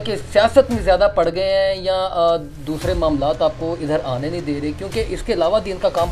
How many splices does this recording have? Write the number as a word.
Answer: zero